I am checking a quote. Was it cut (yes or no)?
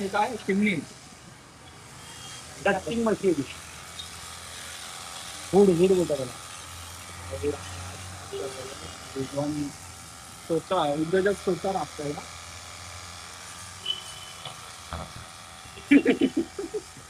no